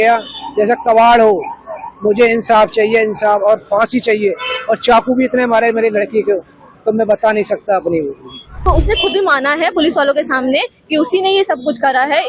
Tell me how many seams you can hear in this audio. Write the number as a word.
one